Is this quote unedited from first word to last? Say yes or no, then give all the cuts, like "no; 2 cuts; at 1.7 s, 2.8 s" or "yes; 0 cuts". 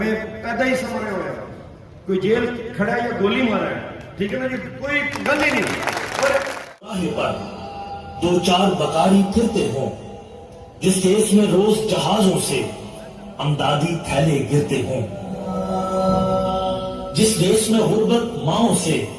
no; 1 cut; at 6.9 s